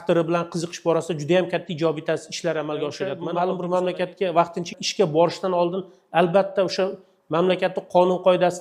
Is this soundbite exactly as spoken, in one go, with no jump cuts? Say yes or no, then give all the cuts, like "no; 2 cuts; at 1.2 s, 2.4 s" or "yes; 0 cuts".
no; 1 cut; at 3.2 s